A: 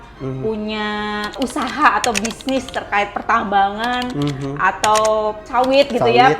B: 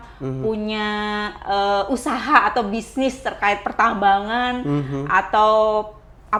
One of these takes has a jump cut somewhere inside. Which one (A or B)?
A